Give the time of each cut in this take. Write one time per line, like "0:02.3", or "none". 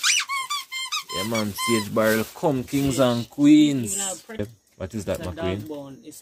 0:04.4